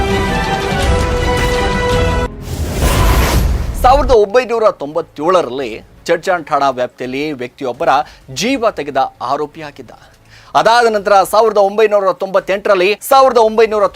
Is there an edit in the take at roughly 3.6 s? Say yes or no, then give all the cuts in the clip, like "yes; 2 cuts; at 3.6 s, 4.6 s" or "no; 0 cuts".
yes; 2 cuts; at 3.6 s, 13.0 s